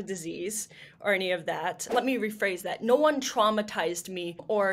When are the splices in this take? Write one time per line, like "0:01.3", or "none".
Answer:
0:01.8

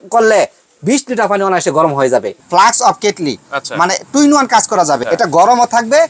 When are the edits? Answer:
0:02.4
0:05.0

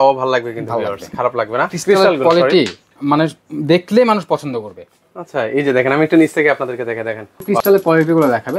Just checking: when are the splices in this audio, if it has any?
0:01.8
0:07.4

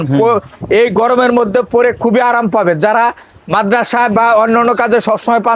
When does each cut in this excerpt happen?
none

